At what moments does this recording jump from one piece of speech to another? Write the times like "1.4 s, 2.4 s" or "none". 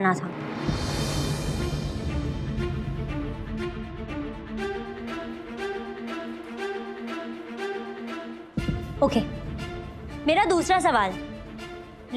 none

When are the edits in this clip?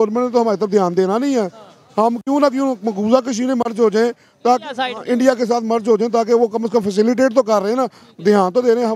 none

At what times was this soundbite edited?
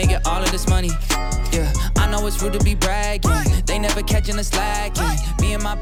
none

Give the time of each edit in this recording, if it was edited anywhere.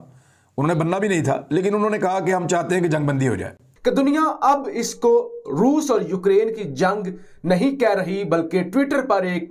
3.6 s

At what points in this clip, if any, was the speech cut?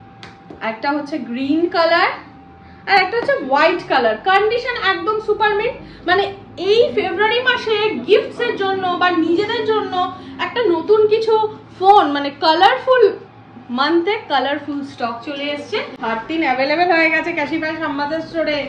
16.0 s

